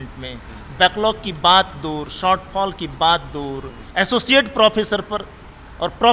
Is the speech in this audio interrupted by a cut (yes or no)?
yes